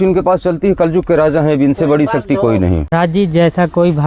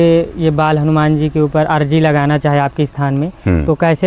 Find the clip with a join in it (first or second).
first